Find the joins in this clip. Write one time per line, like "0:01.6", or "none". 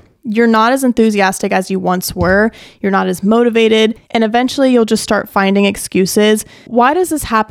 0:04.0
0:06.6

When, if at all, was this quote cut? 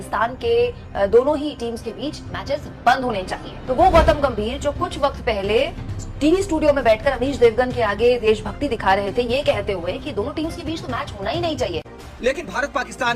0:11.9

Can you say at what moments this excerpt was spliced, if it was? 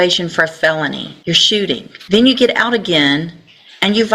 0:01.1
0:01.9

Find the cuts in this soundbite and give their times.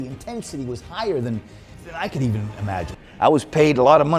0:03.0

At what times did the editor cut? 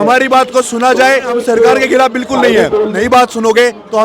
0:01.3
0:02.9

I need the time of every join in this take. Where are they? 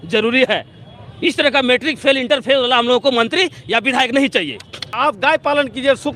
0:04.9

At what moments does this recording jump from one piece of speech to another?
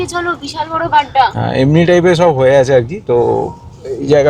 none

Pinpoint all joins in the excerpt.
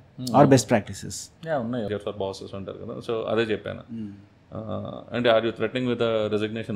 0:01.9

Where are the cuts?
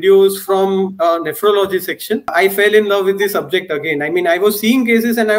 0:02.3

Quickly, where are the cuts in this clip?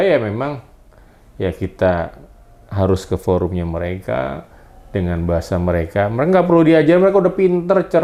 none

